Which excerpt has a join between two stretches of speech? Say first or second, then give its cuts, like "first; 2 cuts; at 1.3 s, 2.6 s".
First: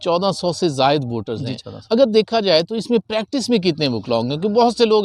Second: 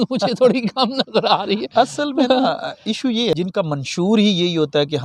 second; 1 cut; at 3.3 s